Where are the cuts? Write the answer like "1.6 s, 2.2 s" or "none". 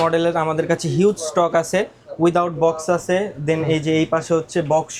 none